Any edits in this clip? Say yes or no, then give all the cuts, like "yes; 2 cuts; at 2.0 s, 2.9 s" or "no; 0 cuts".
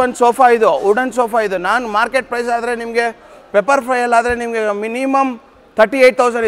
no; 0 cuts